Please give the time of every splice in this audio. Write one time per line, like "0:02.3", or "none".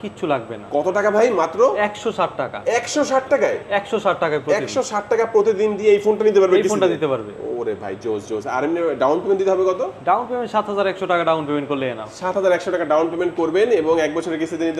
none